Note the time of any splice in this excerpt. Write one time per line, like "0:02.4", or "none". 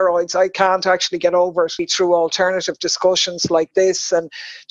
0:01.8